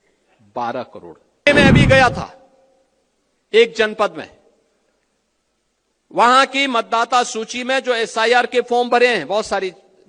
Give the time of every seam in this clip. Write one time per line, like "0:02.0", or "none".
0:01.5